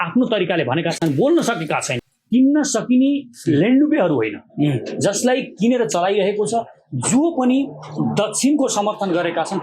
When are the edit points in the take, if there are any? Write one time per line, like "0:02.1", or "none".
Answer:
0:02.0